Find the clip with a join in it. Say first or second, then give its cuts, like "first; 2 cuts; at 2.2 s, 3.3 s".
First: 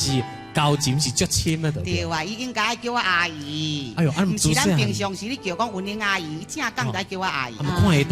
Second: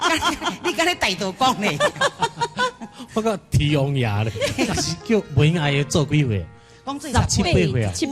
second; 1 cut; at 4.8 s